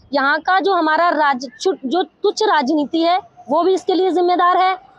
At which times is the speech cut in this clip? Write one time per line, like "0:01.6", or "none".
none